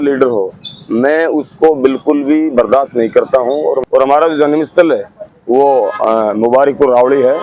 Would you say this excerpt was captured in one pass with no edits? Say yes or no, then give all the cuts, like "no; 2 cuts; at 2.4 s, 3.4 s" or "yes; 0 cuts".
no; 1 cut; at 3.8 s